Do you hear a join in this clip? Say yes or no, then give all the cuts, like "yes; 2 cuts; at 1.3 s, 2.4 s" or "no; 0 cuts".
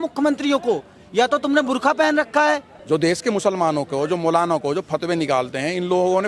yes; 1 cut; at 2.7 s